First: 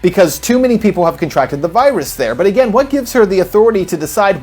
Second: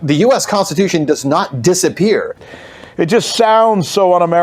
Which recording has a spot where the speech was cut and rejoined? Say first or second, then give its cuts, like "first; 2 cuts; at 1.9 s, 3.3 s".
second; 1 cut; at 2.4 s